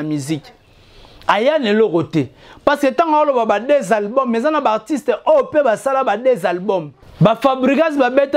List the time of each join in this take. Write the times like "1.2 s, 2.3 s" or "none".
7.0 s

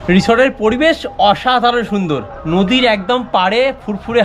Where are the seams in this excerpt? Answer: none

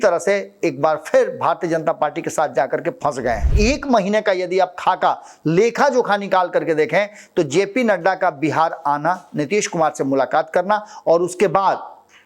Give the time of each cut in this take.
3.5 s

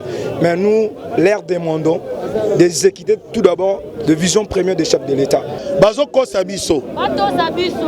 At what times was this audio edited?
5.5 s

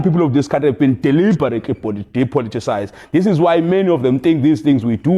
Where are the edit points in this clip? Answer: none

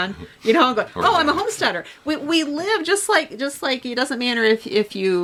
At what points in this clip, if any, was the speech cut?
none

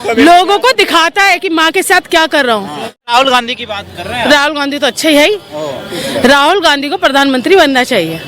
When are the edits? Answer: 3.0 s

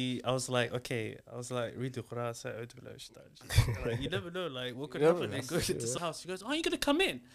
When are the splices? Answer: 5.9 s

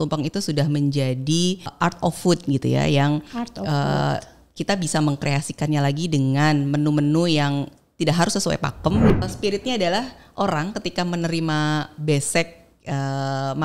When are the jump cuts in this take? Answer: 1.7 s, 9.2 s

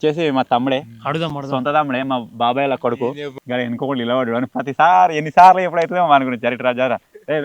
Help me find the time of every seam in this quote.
3.3 s

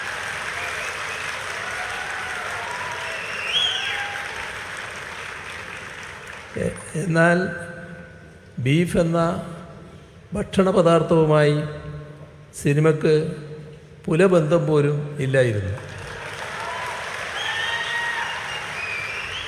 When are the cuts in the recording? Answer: none

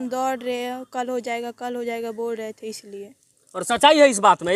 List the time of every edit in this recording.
none

